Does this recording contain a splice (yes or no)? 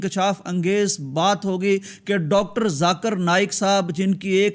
no